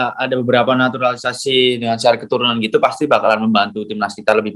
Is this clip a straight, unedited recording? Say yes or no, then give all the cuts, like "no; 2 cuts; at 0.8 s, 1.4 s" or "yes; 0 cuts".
yes; 0 cuts